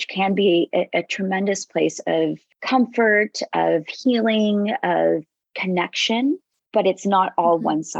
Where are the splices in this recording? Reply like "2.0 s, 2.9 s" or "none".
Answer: 2.5 s, 6.6 s